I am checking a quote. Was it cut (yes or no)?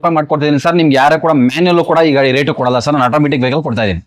no